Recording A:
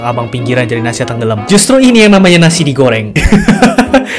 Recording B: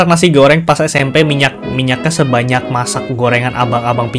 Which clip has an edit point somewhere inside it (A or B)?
A